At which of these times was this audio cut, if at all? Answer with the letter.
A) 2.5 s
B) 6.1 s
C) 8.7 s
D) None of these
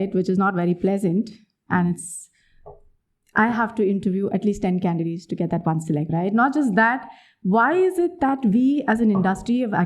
B